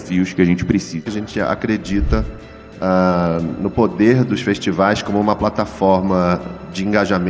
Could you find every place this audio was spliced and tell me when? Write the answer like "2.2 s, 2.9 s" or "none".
1.0 s

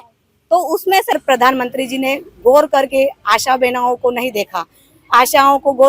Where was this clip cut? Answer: 1.1 s

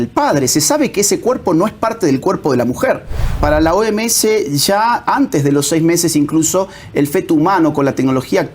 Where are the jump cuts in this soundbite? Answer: 3.4 s

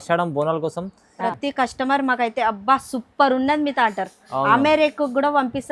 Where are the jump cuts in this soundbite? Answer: 1.2 s

